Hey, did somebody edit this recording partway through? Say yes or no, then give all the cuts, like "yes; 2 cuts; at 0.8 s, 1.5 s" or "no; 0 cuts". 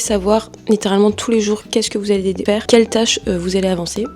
yes; 1 cut; at 2.4 s